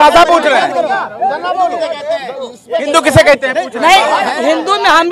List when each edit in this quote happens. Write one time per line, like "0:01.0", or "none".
none